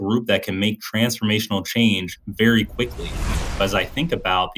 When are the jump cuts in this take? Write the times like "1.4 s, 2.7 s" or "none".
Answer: 2.2 s, 3.4 s